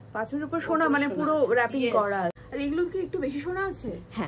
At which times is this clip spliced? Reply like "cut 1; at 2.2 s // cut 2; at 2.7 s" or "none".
cut 1; at 2.5 s

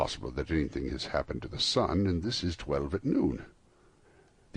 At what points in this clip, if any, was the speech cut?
cut 1; at 3.2 s

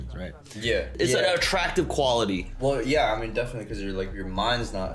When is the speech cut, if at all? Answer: cut 1; at 1.0 s

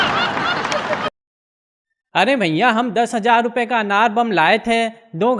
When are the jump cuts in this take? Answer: cut 1; at 1.1 s

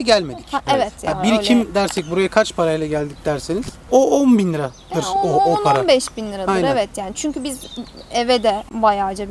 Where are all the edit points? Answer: none

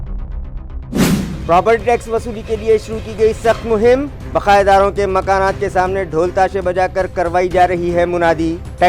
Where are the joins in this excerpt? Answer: none

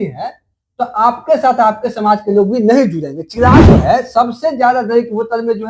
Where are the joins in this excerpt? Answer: cut 1; at 3.6 s

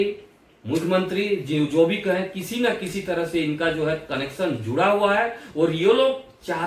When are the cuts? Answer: none

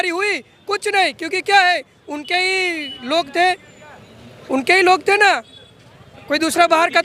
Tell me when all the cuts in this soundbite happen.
none

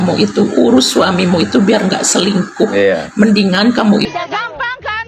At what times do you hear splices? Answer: cut 1; at 4.1 s

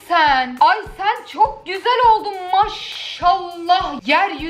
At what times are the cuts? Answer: none

